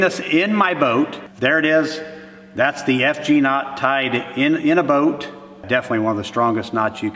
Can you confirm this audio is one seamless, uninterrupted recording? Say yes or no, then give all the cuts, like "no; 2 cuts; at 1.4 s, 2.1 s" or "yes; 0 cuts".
no; 2 cuts; at 1.3 s, 5.7 s